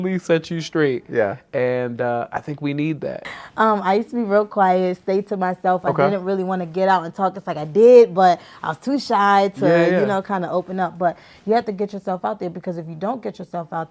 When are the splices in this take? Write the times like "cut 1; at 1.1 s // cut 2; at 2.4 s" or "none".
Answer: cut 1; at 3.3 s